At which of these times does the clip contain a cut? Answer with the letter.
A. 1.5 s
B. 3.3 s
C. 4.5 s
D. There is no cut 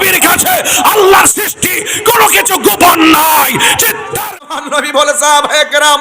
C